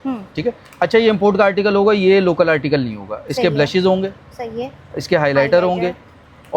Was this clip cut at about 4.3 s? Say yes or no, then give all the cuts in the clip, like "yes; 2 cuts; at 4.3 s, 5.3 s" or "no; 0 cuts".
no; 0 cuts